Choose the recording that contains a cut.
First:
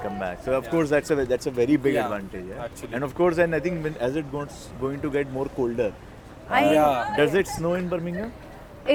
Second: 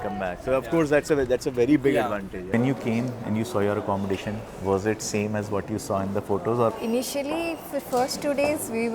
second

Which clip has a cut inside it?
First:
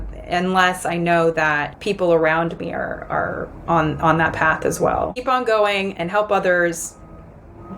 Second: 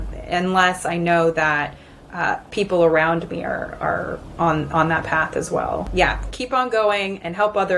first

